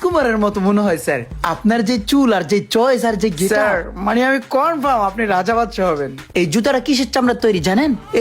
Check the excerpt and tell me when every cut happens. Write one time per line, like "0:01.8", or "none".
0:06.2